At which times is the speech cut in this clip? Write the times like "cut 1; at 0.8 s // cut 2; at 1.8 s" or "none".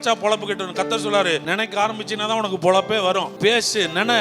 cut 1; at 1.4 s // cut 2; at 3.3 s